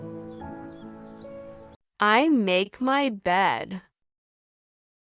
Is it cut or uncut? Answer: cut